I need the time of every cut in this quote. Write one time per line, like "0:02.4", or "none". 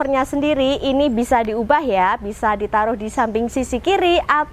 none